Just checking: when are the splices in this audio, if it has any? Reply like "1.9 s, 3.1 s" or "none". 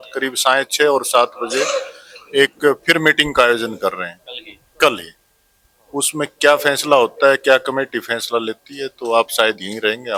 none